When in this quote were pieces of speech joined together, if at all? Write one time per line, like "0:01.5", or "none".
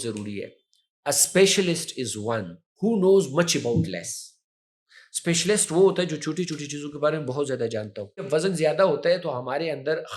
0:08.3